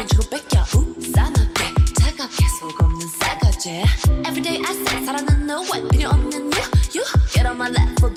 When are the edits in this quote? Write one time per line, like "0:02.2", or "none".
none